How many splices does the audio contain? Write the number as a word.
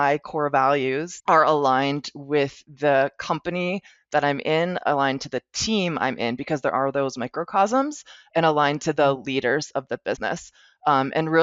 one